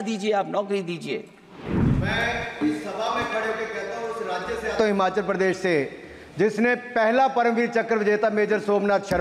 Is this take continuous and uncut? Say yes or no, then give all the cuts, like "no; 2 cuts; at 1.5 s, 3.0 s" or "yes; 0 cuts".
no; 1 cut; at 1.7 s